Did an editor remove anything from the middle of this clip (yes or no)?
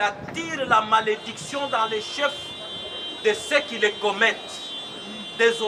no